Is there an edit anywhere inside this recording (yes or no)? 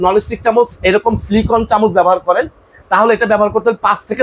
no